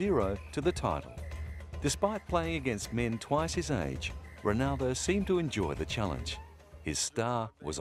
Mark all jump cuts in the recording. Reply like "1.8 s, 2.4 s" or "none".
none